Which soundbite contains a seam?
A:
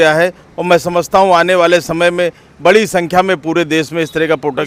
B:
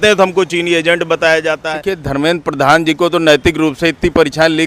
B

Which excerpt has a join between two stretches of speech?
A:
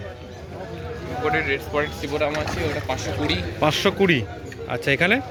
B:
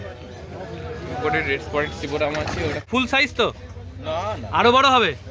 B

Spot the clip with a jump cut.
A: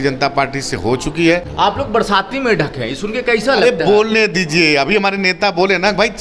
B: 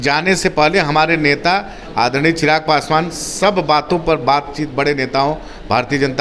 A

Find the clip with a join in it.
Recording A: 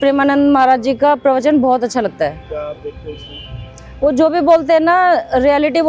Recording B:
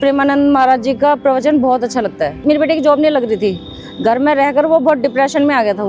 B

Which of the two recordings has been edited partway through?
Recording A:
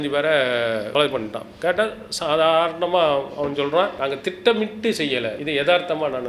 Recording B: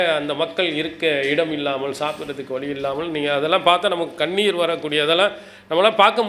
A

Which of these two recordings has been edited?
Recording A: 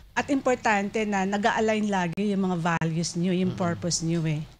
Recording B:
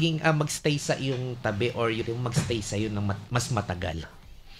B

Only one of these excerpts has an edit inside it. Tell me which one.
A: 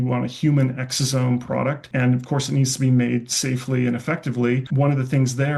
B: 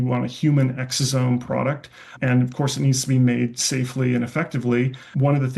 A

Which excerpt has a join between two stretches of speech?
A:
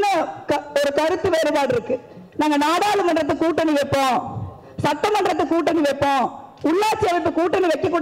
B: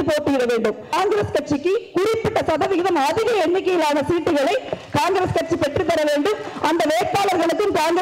B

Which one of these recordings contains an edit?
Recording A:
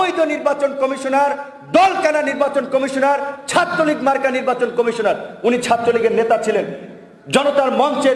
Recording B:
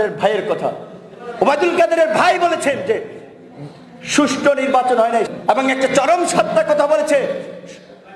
B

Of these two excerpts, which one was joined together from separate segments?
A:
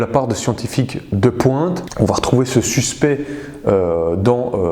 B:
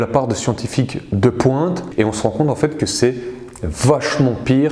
A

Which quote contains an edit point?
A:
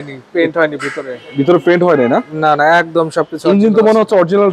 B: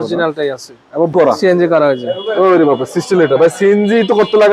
B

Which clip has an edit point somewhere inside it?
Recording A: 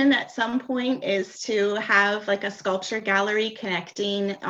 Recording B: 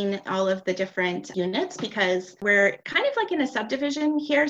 B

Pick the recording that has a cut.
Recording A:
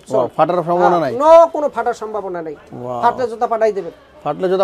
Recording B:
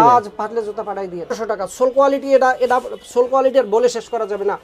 B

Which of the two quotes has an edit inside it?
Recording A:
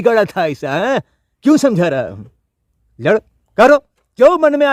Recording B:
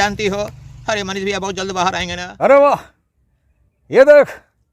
B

